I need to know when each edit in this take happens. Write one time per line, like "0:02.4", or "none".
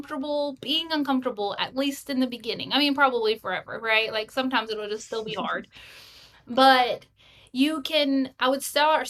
none